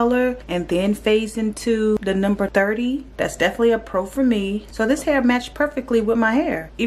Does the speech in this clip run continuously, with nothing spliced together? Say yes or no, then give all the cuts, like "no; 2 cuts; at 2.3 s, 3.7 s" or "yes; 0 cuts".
no; 1 cut; at 2.0 s